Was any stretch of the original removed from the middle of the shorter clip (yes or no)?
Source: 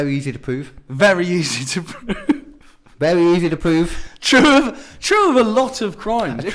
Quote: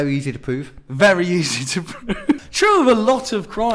yes